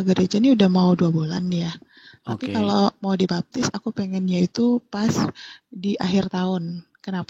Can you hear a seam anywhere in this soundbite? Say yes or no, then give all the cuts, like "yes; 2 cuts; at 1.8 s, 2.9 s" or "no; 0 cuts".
no; 0 cuts